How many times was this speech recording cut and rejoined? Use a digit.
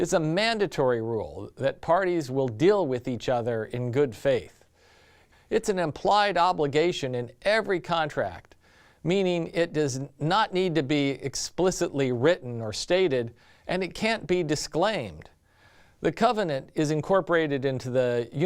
1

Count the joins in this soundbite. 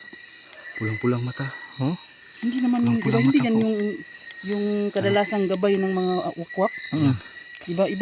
1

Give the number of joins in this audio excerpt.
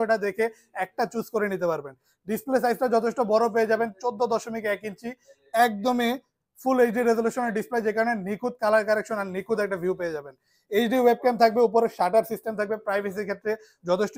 0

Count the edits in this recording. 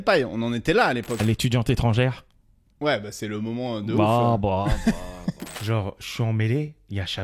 2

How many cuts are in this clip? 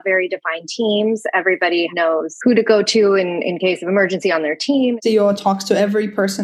2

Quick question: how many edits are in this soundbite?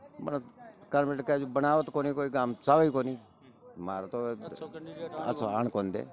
0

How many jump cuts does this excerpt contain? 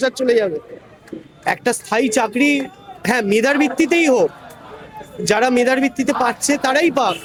0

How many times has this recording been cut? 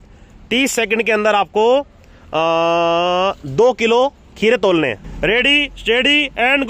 1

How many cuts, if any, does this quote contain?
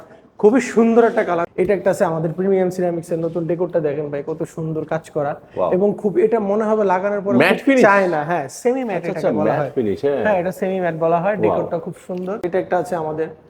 2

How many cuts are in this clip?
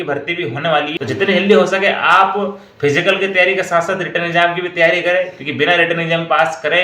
1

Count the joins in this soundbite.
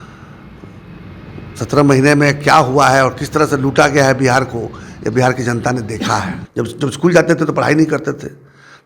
1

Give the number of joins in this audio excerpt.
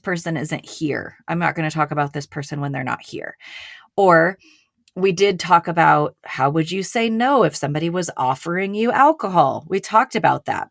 0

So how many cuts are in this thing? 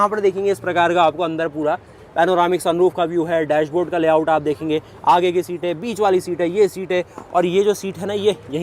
0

